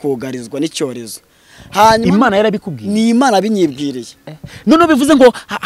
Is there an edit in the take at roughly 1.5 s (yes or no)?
no